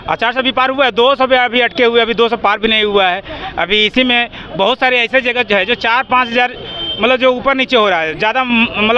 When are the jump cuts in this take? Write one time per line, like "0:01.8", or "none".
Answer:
none